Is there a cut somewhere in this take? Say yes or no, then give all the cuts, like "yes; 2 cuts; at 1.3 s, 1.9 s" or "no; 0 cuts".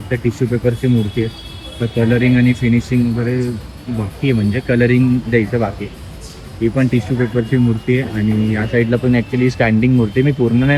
no; 0 cuts